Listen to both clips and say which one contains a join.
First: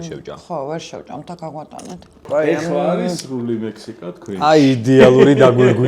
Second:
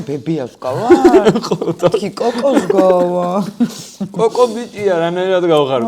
first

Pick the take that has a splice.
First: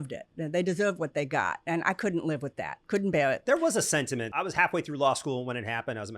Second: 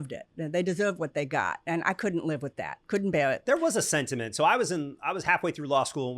first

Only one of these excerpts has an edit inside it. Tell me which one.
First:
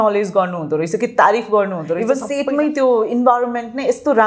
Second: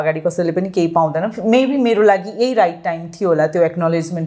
first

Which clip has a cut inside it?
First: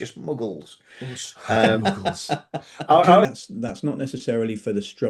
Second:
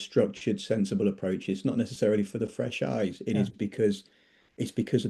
first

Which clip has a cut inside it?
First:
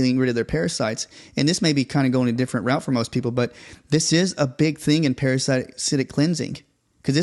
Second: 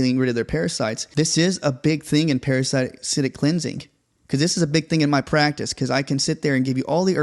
second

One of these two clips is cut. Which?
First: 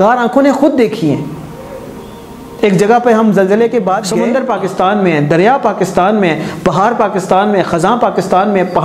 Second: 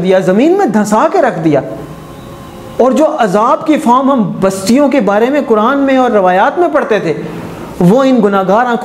first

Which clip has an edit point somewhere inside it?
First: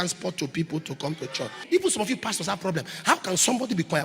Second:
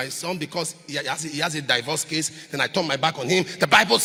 first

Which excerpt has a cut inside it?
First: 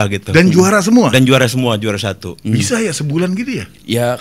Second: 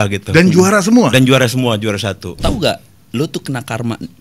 second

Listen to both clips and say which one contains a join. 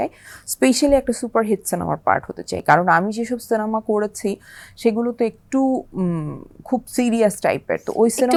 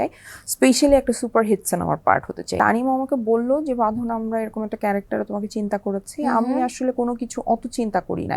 second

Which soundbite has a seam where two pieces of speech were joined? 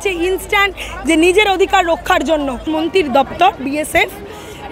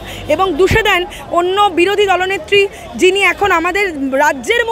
first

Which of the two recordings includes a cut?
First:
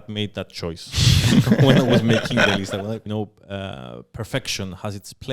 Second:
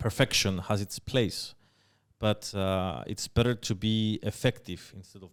first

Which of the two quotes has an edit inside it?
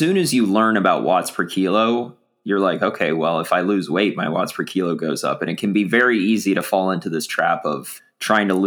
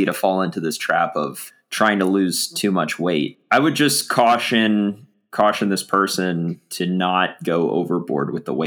second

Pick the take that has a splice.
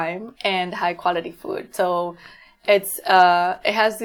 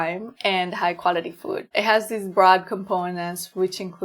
second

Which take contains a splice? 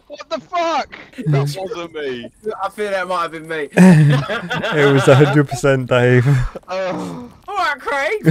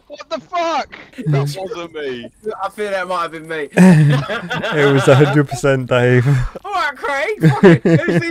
second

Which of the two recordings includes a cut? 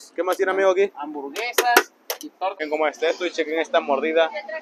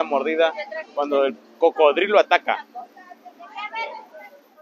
first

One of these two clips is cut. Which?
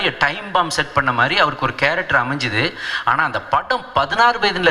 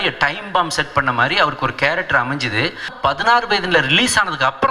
second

